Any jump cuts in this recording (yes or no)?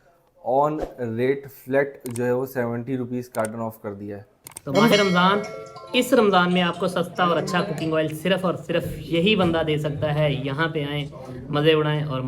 yes